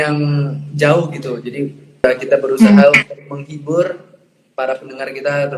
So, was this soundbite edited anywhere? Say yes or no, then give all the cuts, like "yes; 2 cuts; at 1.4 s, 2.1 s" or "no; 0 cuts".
yes; 1 cut; at 2.0 s